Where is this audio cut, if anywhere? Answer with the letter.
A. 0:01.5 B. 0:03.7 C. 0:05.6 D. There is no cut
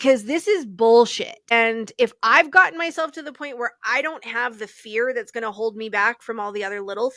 A